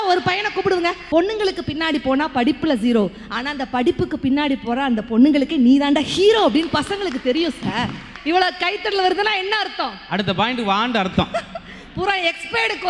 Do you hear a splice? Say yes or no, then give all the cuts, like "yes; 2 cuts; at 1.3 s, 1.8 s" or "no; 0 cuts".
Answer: yes; 2 cuts; at 1.0 s, 8.1 s